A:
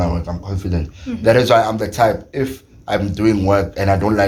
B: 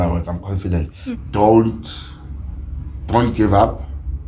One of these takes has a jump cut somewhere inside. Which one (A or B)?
B